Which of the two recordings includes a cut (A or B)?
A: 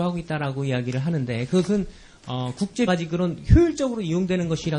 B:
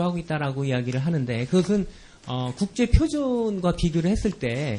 B